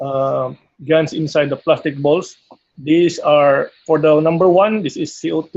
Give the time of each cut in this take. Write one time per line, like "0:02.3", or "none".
0:01.6

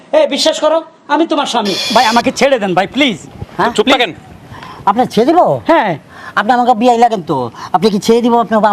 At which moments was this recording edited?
0:01.8

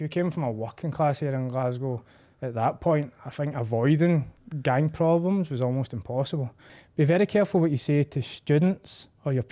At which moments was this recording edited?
0:06.7

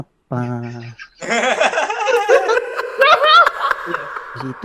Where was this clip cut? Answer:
none

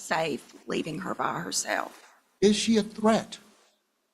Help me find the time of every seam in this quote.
0:02.3

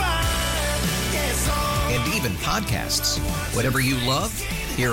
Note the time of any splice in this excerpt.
none

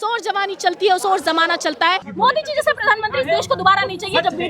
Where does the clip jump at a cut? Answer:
0:02.1

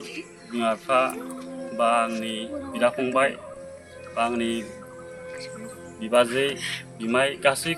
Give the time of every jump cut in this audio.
none

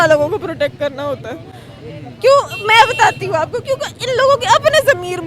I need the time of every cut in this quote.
none

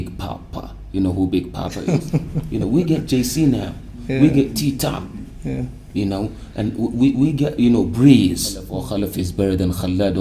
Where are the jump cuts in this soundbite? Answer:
0:01.8
0:08.8

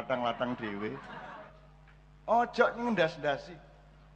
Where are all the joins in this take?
0:01.5

